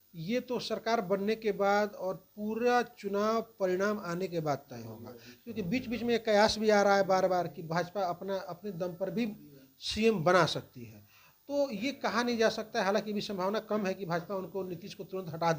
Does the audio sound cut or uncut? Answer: uncut